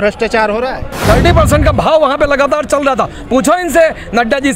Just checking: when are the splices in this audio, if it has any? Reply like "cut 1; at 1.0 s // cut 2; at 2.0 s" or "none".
cut 1; at 0.9 s